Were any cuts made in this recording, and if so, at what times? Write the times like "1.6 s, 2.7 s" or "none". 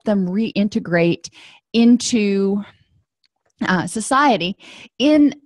1.4 s